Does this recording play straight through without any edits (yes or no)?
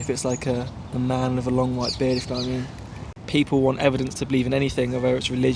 no